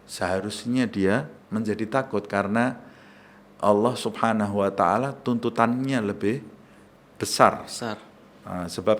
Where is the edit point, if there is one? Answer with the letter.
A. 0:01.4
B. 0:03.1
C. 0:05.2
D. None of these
A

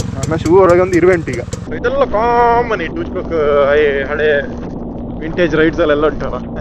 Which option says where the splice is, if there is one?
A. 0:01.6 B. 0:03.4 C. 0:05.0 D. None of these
A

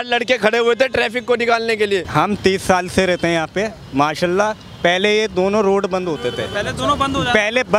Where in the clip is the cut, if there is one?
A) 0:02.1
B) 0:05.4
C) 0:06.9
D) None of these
A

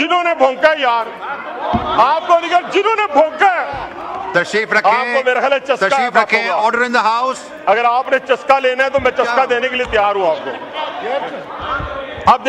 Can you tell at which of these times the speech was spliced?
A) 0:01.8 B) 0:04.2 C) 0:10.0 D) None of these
B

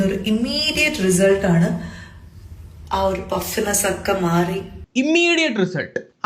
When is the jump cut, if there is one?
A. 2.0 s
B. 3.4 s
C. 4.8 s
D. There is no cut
C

